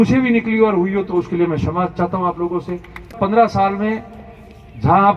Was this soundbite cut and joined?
yes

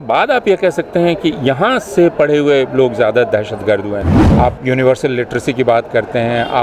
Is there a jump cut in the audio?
yes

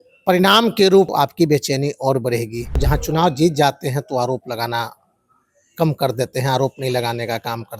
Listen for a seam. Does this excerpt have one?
yes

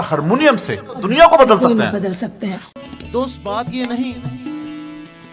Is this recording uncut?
no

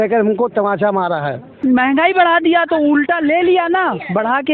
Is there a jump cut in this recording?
yes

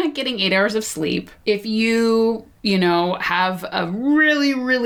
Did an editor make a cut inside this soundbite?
yes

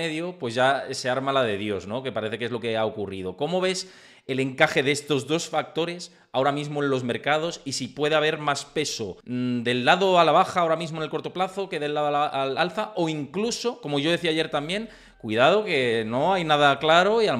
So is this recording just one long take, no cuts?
yes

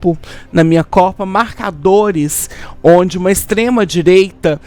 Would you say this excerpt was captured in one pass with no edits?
yes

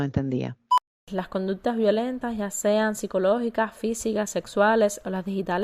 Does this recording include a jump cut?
yes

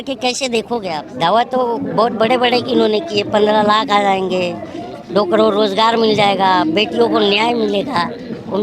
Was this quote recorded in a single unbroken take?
no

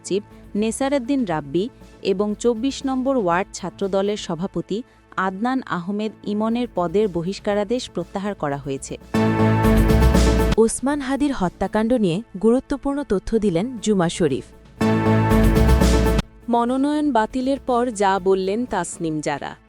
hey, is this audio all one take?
no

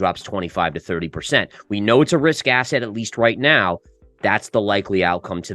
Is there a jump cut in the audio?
no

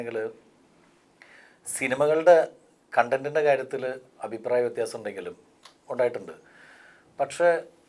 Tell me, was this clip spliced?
no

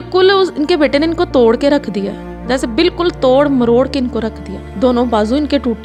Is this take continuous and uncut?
yes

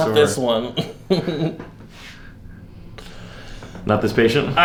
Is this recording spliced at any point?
no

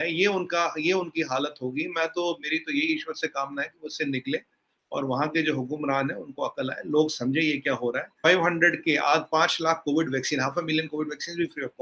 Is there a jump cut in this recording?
yes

